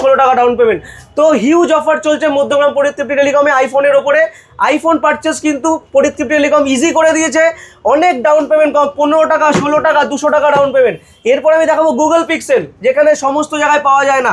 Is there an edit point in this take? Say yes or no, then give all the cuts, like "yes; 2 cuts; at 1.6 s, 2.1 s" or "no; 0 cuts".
no; 0 cuts